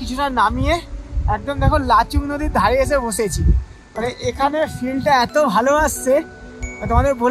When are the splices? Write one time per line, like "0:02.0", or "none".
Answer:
none